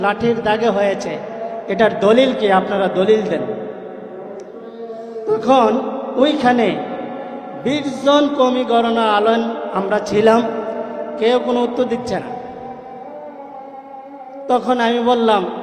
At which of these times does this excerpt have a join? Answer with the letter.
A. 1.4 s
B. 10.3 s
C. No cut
C